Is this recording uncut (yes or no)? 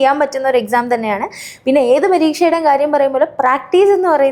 yes